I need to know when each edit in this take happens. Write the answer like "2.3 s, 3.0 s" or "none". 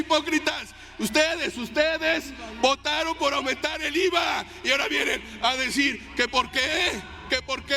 none